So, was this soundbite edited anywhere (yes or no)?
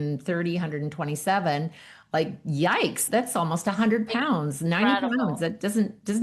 no